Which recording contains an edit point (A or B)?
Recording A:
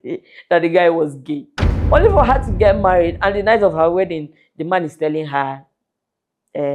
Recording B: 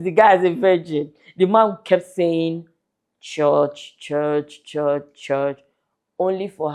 A